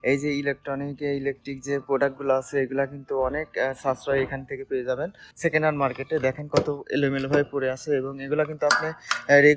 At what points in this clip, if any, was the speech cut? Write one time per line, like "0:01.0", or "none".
0:05.2